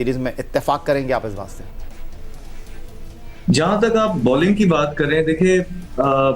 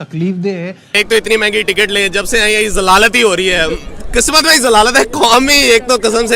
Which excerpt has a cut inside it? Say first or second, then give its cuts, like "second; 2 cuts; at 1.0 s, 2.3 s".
second; 1 cut; at 0.9 s